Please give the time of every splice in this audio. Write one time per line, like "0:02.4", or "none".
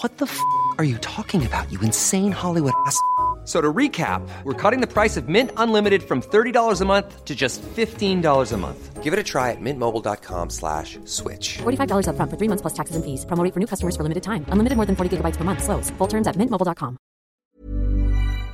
0:17.4